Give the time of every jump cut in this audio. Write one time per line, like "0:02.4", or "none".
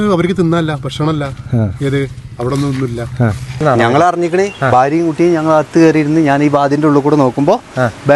0:03.6